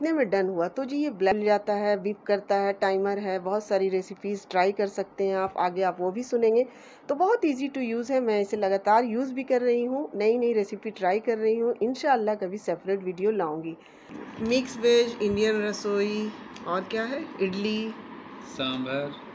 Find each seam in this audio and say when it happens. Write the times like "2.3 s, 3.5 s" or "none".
1.3 s, 14.1 s